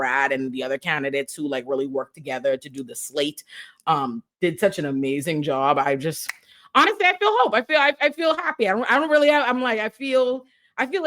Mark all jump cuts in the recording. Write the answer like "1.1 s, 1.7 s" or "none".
none